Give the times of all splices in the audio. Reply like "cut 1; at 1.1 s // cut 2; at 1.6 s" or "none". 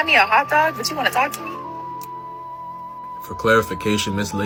none